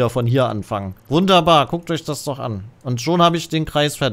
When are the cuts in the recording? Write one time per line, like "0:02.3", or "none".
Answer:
0:00.9